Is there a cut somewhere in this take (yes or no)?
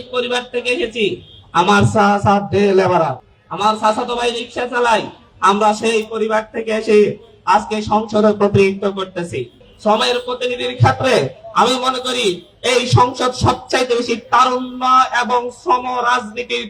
no